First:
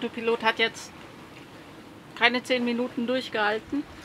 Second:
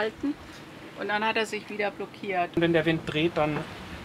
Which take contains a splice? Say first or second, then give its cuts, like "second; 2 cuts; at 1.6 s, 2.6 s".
second; 1 cut; at 2.6 s